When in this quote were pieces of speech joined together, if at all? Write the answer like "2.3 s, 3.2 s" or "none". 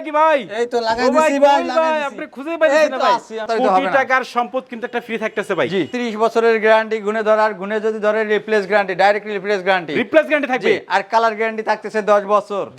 3.4 s, 5.9 s